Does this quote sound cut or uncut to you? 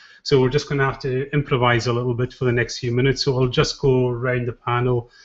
uncut